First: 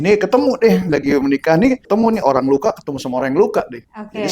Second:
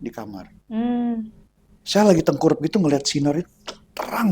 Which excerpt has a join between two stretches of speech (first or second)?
first